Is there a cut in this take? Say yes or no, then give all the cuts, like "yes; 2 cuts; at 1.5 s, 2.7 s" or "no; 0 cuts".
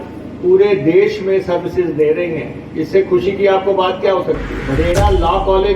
yes; 1 cut; at 4.6 s